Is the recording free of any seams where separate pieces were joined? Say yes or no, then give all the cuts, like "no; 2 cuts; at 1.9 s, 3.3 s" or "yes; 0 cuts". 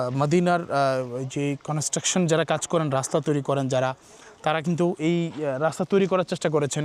yes; 0 cuts